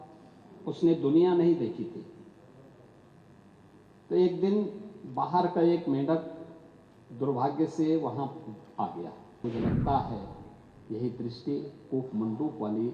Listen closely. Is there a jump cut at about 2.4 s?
no; 1 cut; at 9.4 s

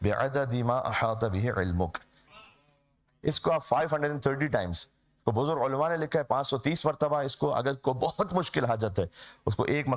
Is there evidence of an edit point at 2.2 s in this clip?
yes; 1 cut; at 2.2 s

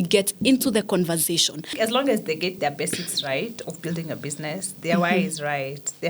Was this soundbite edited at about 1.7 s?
yes; 1 cut; at 1.7 s

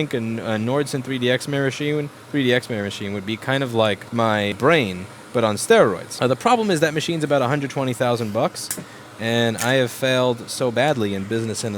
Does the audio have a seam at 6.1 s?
yes; 2 cuts; at 4.5 s, 6.1 s

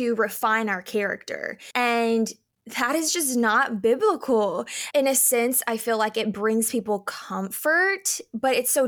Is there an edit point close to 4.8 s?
yes; 1 cut; at 4.8 s

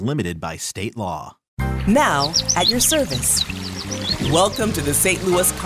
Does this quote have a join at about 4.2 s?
no; 1 cut; at 1.5 s

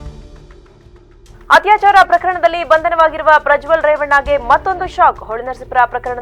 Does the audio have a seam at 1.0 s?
yes; 1 cut; at 1.0 s

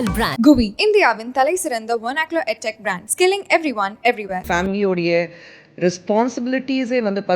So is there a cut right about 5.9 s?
no; 1 cut; at 4.4 s

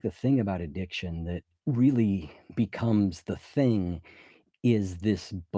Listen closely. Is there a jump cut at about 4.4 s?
no; 2 cuts; at 1.5 s, 2.4 s

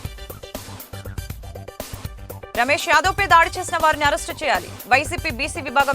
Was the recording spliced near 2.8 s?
no; 1 cut; at 1.1 s

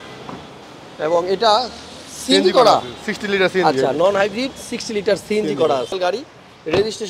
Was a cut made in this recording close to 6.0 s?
yes; 1 cut; at 6.0 s

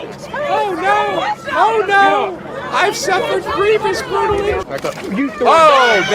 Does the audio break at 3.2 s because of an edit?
no; 1 cut; at 4.7 s

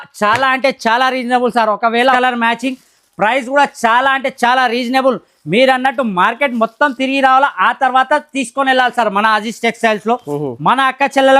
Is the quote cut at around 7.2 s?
no; 1 cut; at 2.0 s

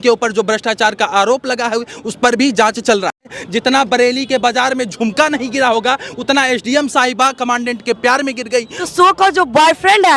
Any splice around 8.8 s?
yes; 2 cuts; at 3.1 s, 8.8 s

